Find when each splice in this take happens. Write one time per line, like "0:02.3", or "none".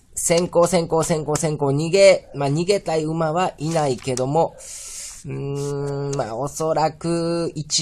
0:06.3